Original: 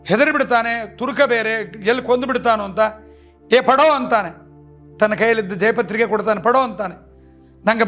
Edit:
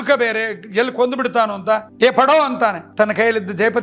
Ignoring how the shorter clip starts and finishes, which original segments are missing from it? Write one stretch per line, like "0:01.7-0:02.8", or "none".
0:03.0-0:03.4
0:04.3-0:04.9